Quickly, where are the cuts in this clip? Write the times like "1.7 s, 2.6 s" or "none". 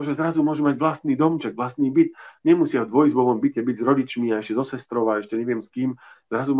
none